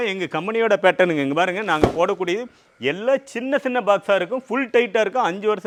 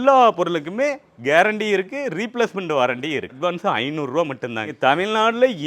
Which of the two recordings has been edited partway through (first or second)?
second